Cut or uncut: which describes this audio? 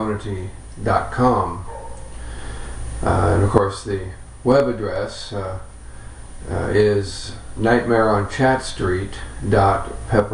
uncut